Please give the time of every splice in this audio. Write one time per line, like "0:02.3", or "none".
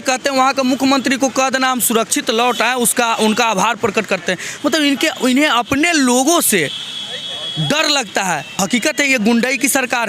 0:08.6